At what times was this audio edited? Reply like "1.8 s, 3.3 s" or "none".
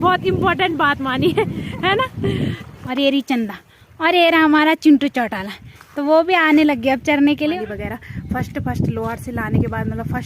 2.7 s, 7.6 s